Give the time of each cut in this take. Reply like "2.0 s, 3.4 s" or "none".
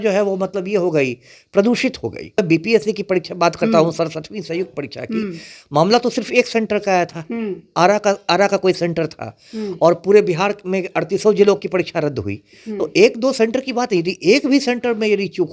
2.3 s